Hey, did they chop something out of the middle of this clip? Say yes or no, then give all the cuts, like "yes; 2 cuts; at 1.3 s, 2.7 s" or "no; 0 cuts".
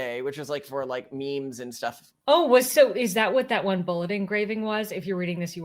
yes; 1 cut; at 2.2 s